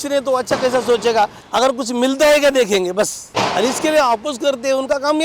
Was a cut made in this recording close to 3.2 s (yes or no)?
yes